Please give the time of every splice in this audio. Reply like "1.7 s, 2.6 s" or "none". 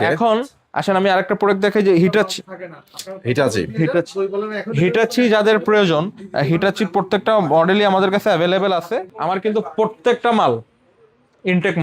9.1 s